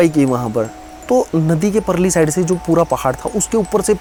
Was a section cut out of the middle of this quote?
no; 0 cuts

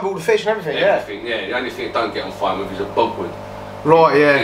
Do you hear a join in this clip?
no; 0 cuts

